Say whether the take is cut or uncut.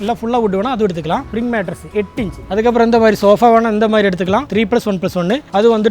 cut